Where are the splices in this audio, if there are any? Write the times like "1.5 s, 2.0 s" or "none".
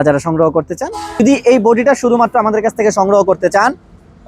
1.2 s